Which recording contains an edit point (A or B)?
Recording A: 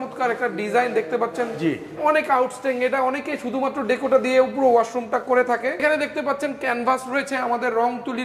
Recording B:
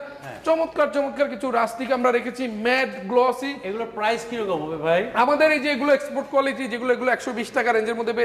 A